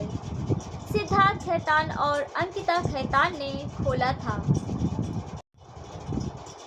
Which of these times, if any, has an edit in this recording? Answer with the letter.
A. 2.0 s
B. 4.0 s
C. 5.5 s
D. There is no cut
C